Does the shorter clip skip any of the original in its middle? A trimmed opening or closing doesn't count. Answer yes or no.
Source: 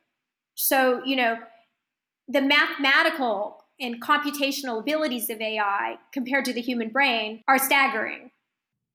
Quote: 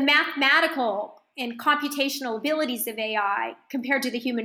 no